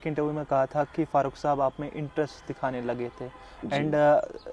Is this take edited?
no; 0 cuts

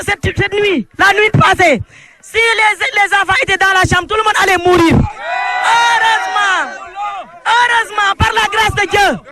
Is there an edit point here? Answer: no; 0 cuts

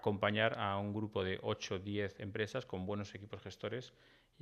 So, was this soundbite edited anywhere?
no; 0 cuts

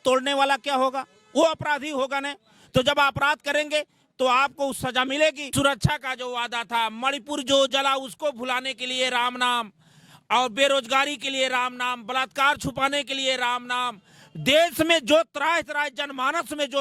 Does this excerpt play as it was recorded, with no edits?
no; 1 cut; at 5.5 s

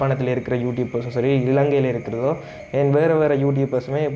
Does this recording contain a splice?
no; 0 cuts

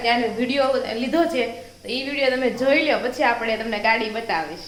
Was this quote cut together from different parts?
no; 0 cuts

